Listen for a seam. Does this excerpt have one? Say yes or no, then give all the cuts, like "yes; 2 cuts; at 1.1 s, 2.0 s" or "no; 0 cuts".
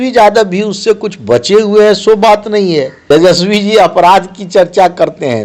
yes; 1 cut; at 2.9 s